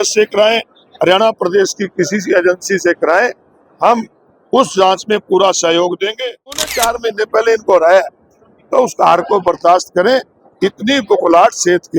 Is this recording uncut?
no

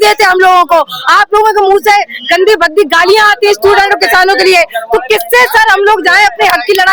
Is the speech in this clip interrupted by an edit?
no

